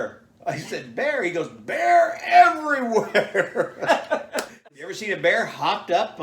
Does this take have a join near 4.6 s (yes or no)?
yes